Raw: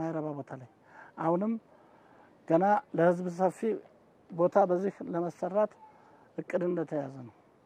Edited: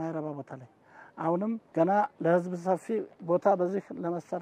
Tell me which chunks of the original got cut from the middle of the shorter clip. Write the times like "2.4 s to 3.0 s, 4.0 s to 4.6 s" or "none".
1.6 s to 2.4 s, 3.9 s to 4.2 s